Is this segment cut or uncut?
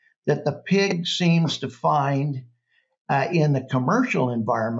uncut